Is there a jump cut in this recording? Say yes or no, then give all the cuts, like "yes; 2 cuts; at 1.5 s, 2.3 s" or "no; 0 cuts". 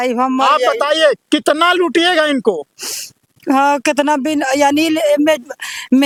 no; 0 cuts